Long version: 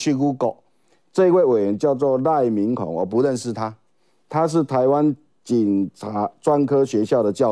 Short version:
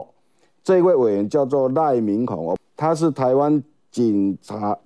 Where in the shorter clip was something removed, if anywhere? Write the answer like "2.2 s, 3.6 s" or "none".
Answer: 2.6 s